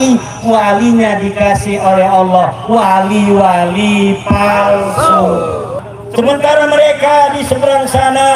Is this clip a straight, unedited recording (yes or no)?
no